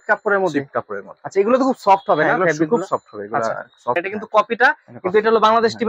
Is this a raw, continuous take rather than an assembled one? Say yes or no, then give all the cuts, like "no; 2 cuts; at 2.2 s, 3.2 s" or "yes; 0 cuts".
no; 1 cut; at 4.0 s